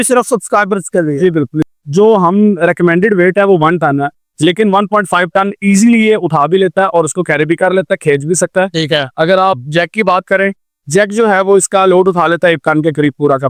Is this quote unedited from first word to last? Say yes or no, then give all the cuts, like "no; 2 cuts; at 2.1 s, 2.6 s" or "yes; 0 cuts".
no; 1 cut; at 1.7 s